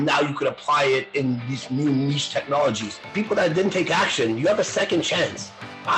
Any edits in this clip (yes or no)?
yes